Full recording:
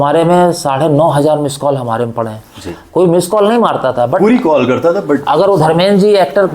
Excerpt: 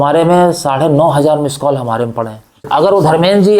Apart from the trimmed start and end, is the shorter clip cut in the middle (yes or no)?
yes